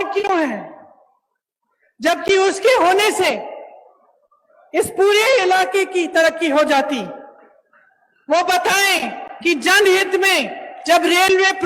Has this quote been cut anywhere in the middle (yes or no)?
no